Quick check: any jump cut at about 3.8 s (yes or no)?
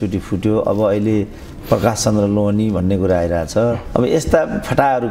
yes